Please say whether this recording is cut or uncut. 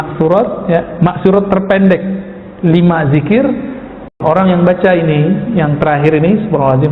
cut